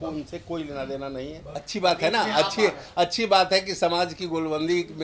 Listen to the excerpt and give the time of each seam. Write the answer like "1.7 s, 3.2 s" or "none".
1.4 s